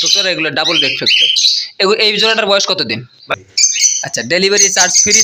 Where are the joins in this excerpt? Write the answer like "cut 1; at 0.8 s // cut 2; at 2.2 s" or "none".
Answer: cut 1; at 3.3 s